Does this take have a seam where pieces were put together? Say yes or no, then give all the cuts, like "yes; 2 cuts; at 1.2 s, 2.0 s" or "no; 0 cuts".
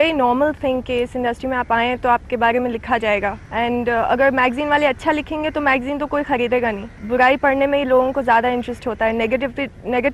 yes; 2 cuts; at 3.4 s, 6.9 s